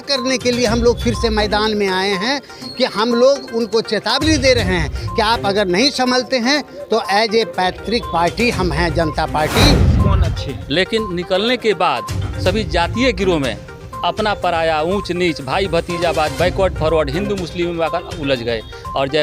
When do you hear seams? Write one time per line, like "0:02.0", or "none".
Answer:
0:10.0